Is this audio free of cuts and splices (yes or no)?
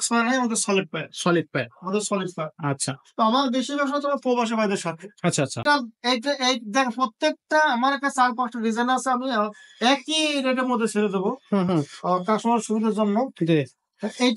no